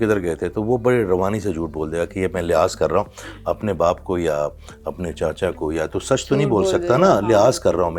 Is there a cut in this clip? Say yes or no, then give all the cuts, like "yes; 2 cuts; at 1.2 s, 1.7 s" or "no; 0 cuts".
no; 0 cuts